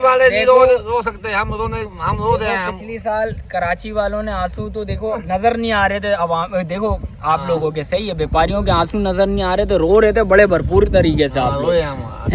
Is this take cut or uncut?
uncut